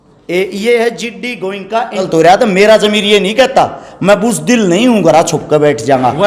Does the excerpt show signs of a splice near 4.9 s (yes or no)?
no